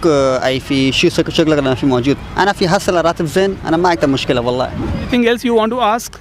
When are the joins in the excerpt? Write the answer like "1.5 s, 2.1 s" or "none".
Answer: 5.1 s